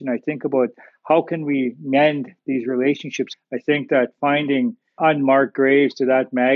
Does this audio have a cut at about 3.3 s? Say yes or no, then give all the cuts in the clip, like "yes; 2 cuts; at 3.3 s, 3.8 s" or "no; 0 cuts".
yes; 1 cut; at 3.3 s